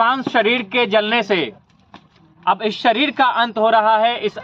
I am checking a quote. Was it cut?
no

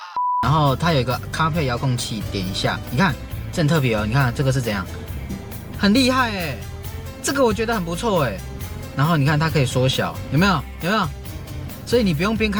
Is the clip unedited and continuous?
yes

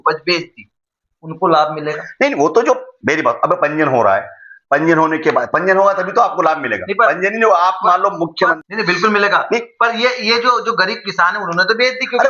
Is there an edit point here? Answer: yes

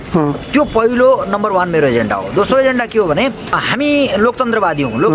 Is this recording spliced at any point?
yes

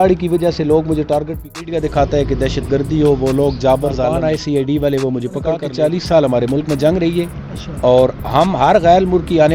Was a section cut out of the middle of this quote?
yes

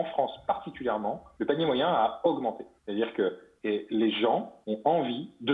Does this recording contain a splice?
yes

